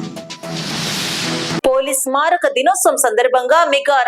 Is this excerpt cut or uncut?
cut